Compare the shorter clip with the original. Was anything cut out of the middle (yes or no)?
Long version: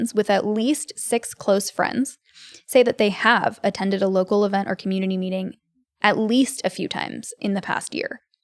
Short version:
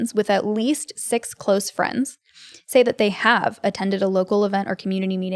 no